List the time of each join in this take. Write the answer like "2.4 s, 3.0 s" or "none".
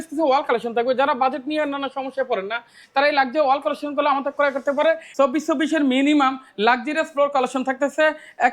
5.1 s